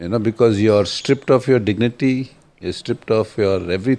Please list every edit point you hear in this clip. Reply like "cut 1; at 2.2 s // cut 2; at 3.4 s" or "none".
cut 1; at 2.6 s